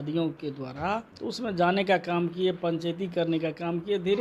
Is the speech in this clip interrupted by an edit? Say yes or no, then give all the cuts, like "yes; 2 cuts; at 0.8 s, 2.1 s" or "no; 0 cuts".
yes; 1 cut; at 1.1 s